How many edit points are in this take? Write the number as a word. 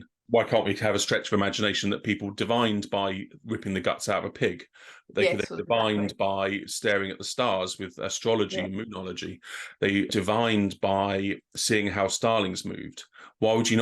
two